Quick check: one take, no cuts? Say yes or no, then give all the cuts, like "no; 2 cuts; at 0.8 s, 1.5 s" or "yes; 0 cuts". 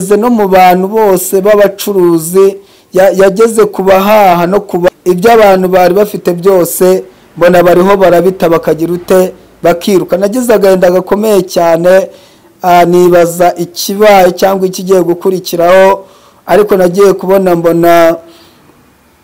no; 1 cut; at 4.9 s